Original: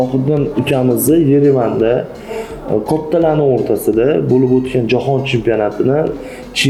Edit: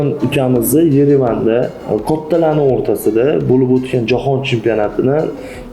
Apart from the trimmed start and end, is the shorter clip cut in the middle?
yes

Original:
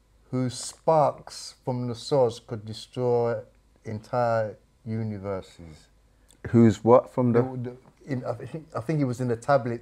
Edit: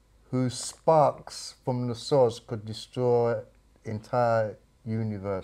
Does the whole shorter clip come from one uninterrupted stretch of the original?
yes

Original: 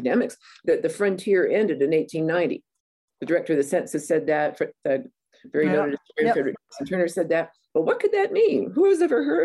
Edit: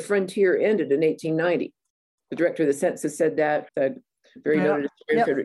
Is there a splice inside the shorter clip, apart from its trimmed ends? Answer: yes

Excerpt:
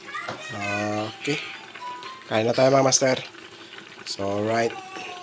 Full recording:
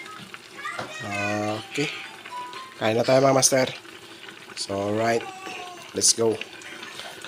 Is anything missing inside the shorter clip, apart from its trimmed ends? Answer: no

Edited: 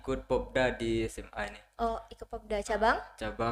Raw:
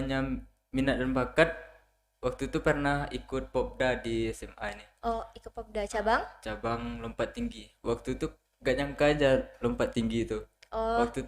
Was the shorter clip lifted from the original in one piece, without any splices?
yes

